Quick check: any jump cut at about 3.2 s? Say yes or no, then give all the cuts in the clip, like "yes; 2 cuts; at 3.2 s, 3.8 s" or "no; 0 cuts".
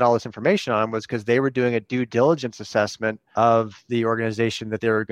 yes; 1 cut; at 3.2 s